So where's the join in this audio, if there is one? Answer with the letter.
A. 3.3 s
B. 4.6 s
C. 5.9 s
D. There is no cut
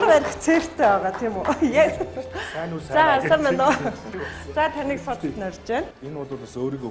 C